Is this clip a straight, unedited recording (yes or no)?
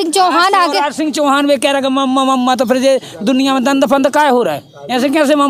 yes